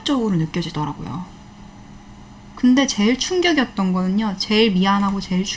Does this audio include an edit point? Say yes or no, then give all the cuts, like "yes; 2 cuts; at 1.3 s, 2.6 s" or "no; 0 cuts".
no; 0 cuts